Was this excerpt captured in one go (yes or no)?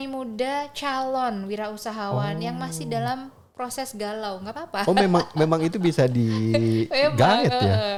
yes